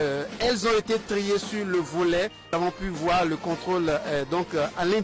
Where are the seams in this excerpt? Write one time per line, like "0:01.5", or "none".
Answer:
0:02.5